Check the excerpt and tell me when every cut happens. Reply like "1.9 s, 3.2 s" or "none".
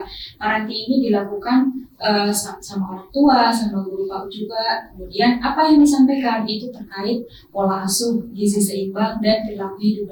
none